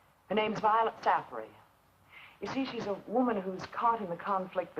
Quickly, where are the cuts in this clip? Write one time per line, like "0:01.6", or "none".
0:03.2